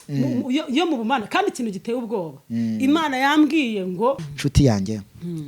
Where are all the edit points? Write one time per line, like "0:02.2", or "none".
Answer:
0:04.3